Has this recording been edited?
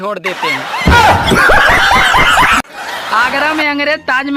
yes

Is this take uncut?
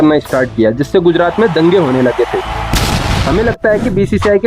no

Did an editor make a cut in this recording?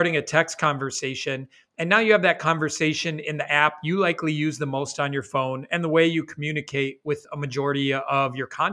no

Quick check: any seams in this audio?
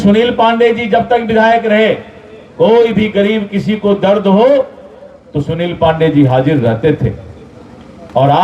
no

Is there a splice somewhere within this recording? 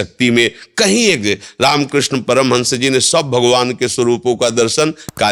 no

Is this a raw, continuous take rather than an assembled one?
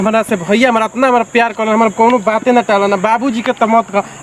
yes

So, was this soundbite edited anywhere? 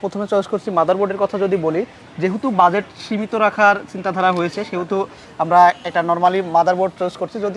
no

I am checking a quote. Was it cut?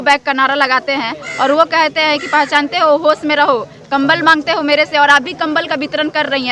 no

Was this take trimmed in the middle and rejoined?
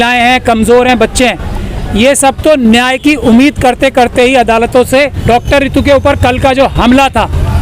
yes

